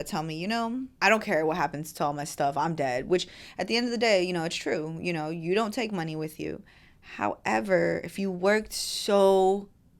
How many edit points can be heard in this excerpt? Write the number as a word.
one